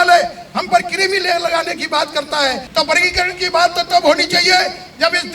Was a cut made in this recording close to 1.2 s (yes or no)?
no